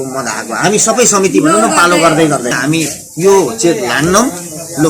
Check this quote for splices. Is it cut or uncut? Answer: cut